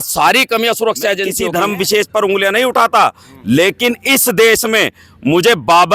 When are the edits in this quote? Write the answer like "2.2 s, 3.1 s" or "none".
1.4 s